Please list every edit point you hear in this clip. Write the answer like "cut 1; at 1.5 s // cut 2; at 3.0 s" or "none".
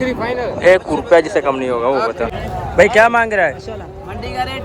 cut 1; at 2.3 s

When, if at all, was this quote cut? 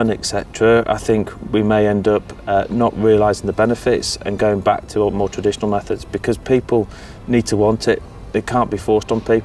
none

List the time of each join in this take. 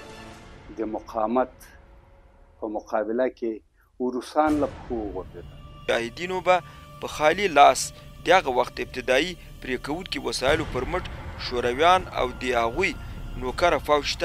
cut 1; at 5.7 s

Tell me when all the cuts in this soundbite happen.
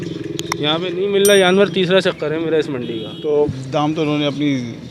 cut 1; at 3.5 s

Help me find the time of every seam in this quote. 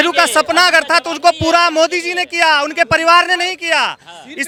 none

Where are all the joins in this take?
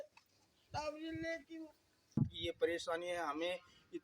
cut 1; at 2.2 s

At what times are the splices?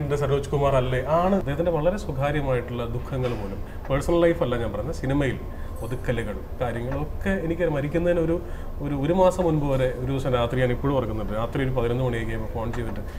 cut 1; at 1.5 s

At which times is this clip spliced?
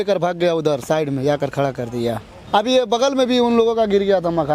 cut 1; at 2.3 s

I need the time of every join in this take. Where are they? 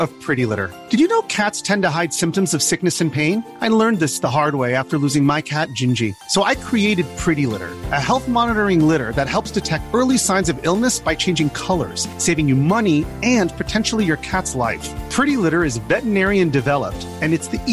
none

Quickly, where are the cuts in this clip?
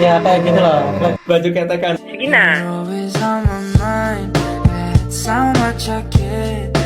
cut 1; at 1.2 s

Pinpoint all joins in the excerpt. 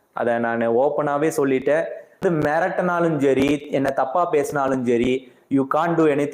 cut 1; at 2.2 s

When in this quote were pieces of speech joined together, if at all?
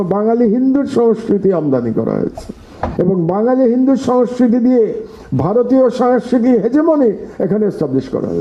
none

